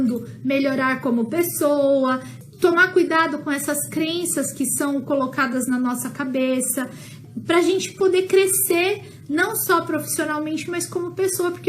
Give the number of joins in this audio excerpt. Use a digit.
2